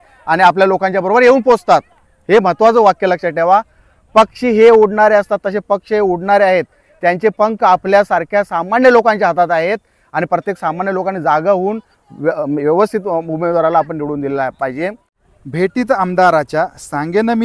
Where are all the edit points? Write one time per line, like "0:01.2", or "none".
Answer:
0:15.1